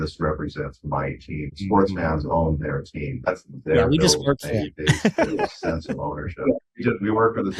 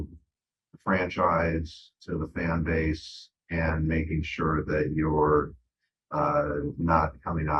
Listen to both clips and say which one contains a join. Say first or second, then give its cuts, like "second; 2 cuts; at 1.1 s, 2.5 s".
first; 3 cuts; at 1.5 s, 3.3 s, 6.7 s